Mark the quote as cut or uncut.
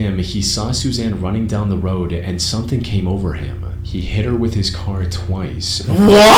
uncut